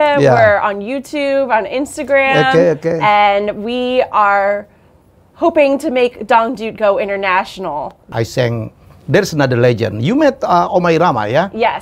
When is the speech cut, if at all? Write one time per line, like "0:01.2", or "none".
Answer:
0:08.0